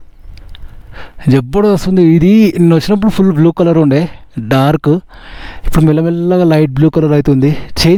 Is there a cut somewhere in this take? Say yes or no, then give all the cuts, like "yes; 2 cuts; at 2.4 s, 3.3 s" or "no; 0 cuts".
no; 0 cuts